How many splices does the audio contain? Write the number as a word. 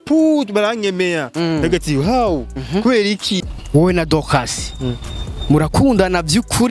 one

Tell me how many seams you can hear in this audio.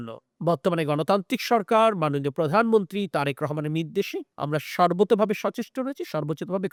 zero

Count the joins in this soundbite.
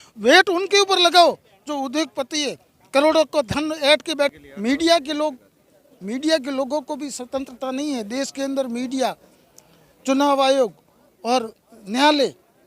one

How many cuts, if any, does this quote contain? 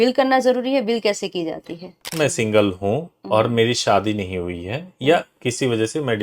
one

